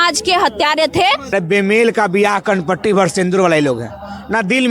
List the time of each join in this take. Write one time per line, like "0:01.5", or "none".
0:01.3